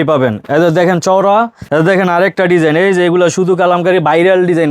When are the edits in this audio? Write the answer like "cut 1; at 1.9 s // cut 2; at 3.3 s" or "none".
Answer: cut 1; at 1.6 s